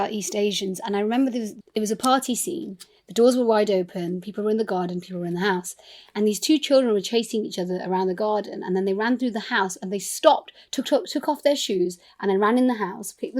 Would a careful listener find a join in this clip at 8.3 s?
no; 1 cut; at 1.6 s

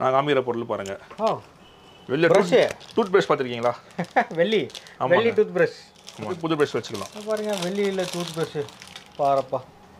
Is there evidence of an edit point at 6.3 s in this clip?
yes; 1 cut; at 6.3 s

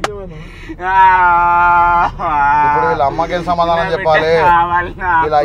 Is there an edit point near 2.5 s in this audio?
no; 0 cuts

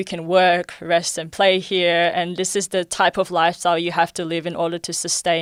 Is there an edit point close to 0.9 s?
no; 0 cuts

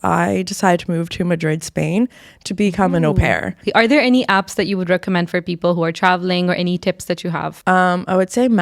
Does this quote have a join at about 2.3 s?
no; 2 cuts; at 3.6 s, 7.5 s

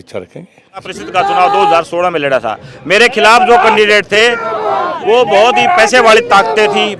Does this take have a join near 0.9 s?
yes; 1 cut; at 0.9 s

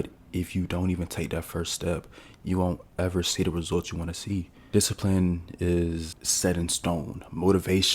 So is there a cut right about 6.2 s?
yes; 2 cuts; at 4.6 s, 6.2 s

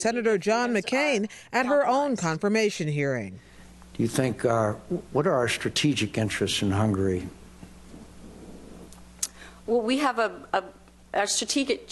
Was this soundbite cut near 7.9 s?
no; 1 cut; at 4.5 s

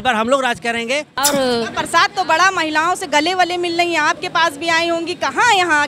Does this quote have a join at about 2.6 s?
no; 1 cut; at 1.2 s

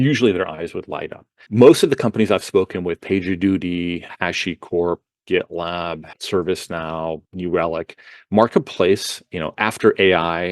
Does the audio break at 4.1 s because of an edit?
yes; 4 cuts; at 1.4 s, 4.1 s, 6.1 s, 7.3 s

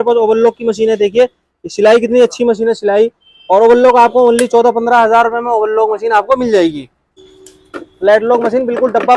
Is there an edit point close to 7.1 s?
yes; 1 cut; at 7.1 s

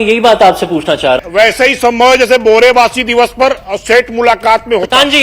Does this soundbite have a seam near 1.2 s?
yes; 1 cut; at 1.2 s

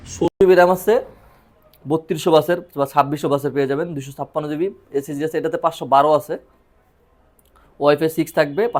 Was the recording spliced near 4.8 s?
no; 0 cuts

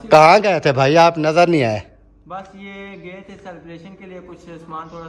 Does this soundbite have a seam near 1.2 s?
no; 0 cuts

